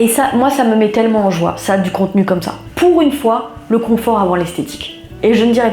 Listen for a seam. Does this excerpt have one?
yes; 1 cut; at 2.6 s

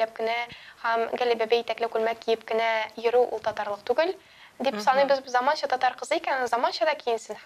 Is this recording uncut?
yes; 0 cuts

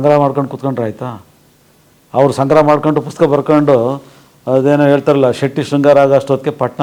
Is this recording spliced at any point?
no; 0 cuts

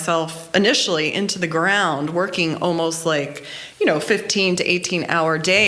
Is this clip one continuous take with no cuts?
yes; 0 cuts

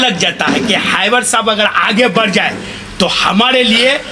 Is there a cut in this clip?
no; 0 cuts

